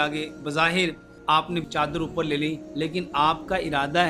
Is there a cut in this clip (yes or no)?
yes